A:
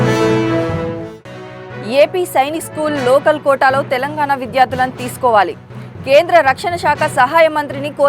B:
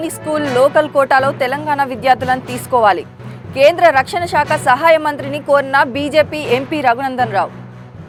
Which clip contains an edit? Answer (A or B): A